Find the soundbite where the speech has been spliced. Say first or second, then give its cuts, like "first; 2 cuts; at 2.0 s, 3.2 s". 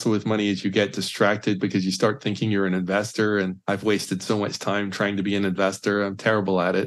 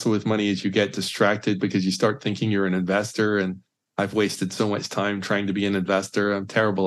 first; 1 cut; at 3.6 s